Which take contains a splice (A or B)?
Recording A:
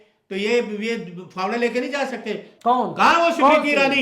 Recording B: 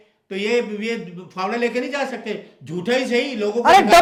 A